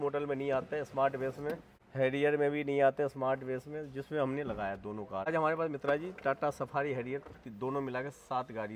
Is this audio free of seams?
no; 2 cuts; at 1.8 s, 5.3 s

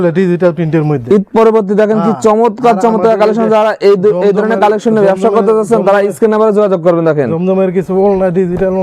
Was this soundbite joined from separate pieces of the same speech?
no; 0 cuts

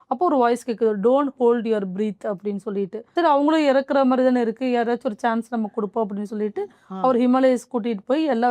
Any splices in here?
yes; 1 cut; at 3.0 s

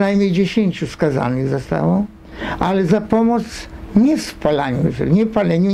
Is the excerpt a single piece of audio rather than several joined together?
yes; 0 cuts

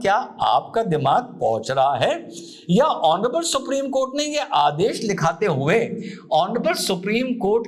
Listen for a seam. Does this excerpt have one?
no; 0 cuts

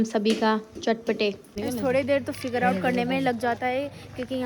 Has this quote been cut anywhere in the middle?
yes; 1 cut; at 1.5 s

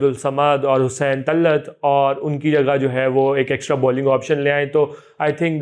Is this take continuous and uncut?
yes; 0 cuts

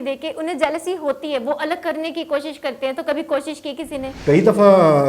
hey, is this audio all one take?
no; 1 cut; at 4.1 s

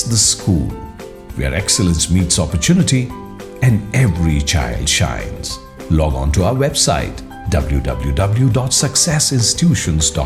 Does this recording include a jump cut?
no; 0 cuts

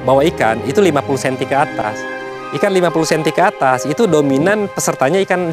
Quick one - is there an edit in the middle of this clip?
no; 0 cuts

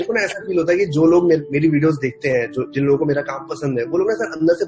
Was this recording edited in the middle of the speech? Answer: no; 0 cuts

